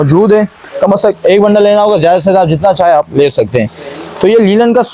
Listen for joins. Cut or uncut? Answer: uncut